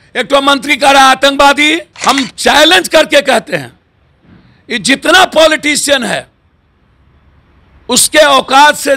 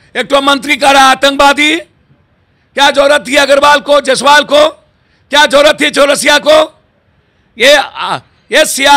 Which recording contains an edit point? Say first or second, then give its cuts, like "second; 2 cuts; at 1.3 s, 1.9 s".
first; 1 cut; at 1.9 s